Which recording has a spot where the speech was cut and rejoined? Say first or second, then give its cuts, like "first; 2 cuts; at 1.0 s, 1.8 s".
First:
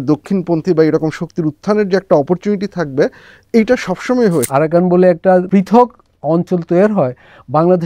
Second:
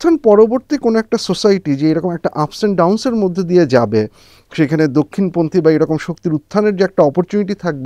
first; 2 cuts; at 4.5 s, 5.5 s